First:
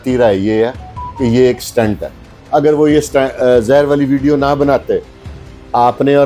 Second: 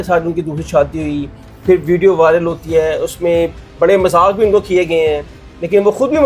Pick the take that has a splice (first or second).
first